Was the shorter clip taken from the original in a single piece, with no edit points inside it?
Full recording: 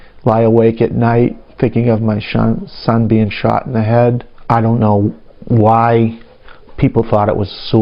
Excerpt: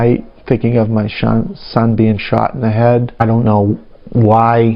no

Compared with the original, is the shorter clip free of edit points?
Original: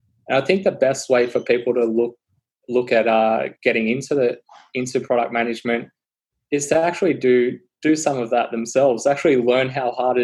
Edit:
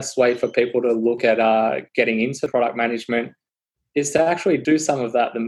no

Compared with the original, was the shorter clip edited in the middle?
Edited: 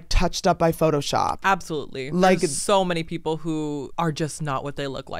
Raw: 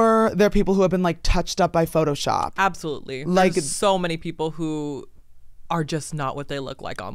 yes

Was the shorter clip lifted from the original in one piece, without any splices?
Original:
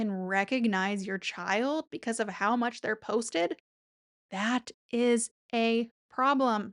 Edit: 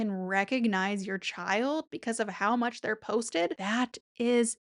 no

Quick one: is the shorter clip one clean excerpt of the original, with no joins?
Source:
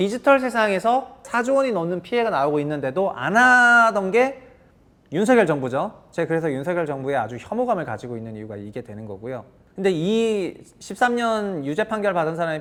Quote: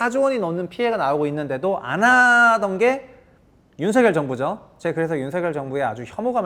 yes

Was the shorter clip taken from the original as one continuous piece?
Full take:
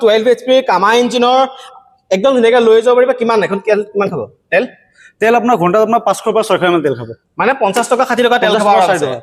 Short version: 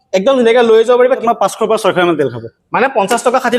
no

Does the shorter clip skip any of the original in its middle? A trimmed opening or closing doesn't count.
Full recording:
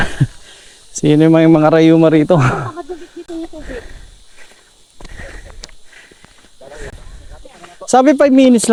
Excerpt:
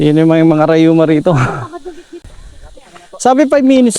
yes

